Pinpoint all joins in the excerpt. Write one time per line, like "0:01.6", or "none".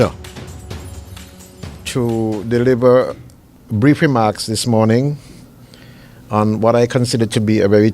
0:02.4